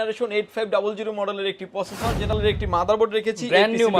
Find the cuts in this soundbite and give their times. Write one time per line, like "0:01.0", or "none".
0:02.3